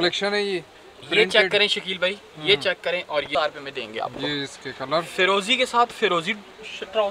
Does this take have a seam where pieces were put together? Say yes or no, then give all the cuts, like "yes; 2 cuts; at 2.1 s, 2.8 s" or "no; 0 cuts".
yes; 1 cut; at 3.3 s